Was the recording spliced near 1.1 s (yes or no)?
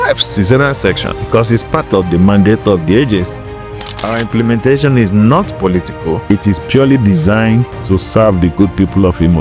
yes